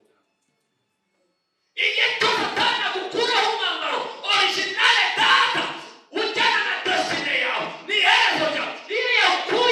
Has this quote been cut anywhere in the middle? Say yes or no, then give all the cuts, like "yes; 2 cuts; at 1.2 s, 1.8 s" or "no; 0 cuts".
no; 0 cuts